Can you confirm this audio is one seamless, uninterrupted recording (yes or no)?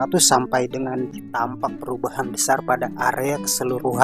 no